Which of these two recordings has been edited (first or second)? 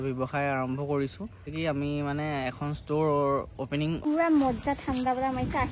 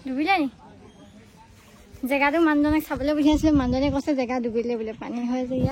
first